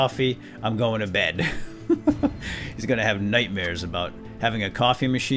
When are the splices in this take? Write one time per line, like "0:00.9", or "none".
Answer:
none